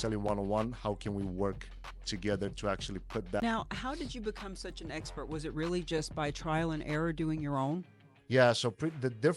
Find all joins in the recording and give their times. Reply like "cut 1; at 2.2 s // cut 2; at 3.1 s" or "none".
cut 1; at 3.4 s

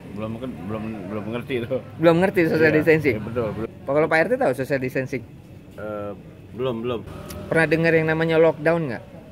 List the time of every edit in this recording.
cut 1; at 3.6 s // cut 2; at 7.1 s

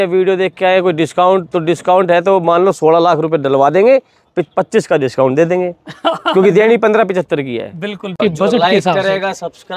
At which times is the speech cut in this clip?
cut 1; at 8.1 s

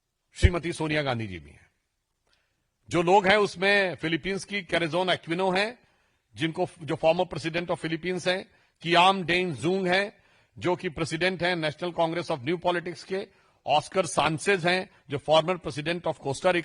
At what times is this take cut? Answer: none

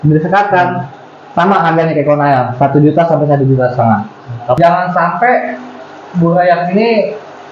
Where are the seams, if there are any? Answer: cut 1; at 4.6 s

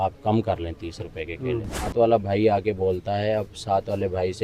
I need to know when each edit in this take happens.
cut 1; at 1.9 s

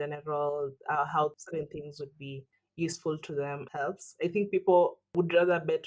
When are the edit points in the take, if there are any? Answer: cut 1; at 1.4 s // cut 2; at 3.6 s // cut 3; at 5.1 s

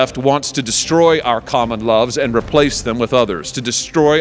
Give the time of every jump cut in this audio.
none

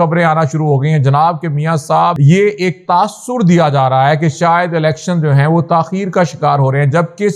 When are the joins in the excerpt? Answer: cut 1; at 2.2 s

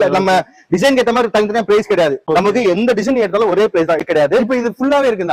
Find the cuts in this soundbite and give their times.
cut 1; at 2.2 s // cut 2; at 4.0 s

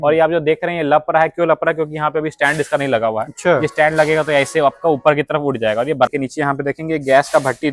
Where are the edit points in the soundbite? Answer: cut 1; at 6.1 s

